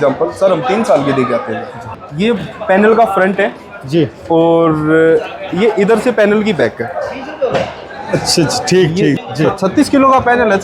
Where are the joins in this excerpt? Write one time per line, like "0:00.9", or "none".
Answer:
0:02.0
0:09.2